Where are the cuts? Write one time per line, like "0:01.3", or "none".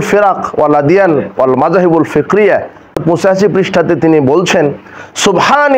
0:03.0